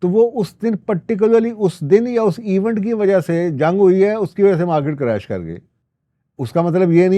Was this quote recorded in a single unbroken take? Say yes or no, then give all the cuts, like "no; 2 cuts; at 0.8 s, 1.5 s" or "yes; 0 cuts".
yes; 0 cuts